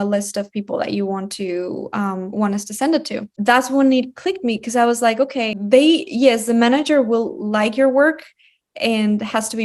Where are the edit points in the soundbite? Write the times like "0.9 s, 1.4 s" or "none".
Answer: 3.3 s, 5.6 s

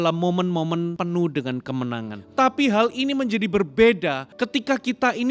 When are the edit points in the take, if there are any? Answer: 0.9 s, 2.2 s, 4.3 s

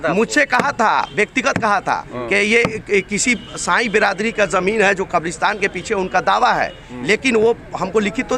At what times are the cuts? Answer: none

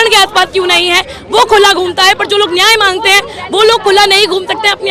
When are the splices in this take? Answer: none

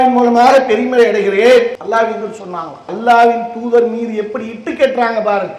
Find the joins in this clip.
1.8 s, 2.9 s

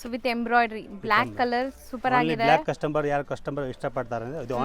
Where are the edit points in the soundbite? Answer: none

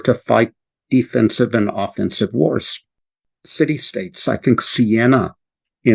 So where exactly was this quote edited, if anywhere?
3.1 s

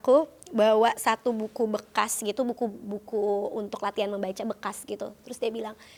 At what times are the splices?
none

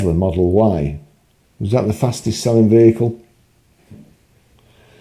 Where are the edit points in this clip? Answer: none

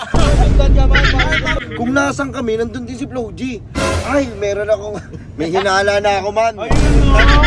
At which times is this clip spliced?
1.6 s

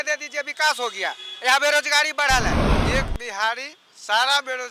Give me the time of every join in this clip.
2.8 s

